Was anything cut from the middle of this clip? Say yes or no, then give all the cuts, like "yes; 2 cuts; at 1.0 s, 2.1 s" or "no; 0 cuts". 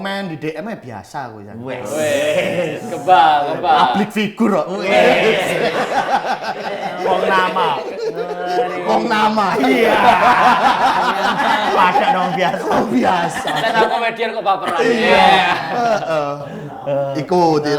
no; 0 cuts